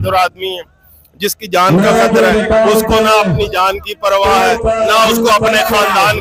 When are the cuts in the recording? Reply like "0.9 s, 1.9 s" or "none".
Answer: none